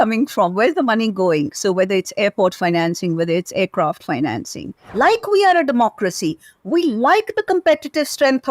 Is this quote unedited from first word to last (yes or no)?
no